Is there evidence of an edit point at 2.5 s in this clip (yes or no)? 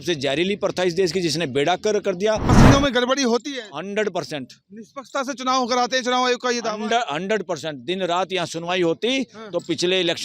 yes